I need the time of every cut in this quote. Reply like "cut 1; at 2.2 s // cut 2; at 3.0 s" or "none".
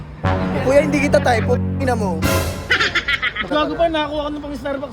cut 1; at 3.5 s